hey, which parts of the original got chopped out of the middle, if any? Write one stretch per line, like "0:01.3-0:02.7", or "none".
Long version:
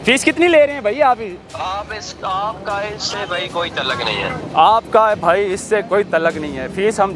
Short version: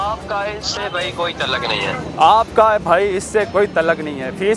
none